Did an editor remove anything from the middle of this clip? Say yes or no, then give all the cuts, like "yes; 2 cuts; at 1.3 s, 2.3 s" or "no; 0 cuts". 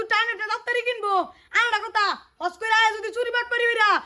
no; 0 cuts